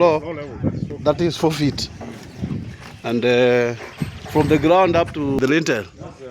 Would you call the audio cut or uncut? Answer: cut